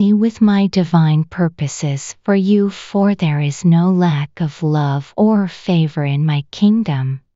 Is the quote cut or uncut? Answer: cut